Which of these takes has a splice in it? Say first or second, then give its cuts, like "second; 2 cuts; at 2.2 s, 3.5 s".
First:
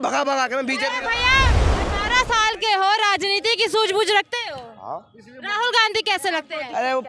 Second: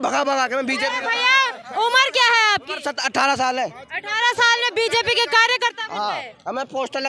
first; 1 cut; at 1.6 s